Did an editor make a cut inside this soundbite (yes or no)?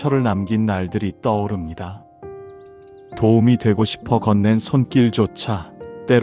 yes